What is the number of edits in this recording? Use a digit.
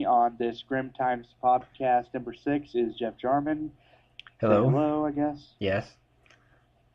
1